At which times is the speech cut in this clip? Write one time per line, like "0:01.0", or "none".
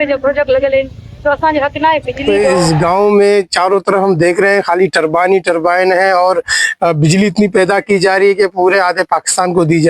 0:02.2